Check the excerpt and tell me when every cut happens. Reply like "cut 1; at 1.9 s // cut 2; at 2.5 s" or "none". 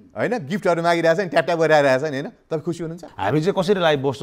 cut 1; at 3.0 s